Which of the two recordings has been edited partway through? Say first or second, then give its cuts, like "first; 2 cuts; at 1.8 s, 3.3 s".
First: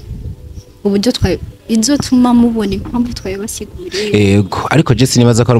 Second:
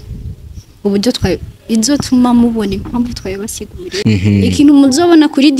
second; 1 cut; at 3.9 s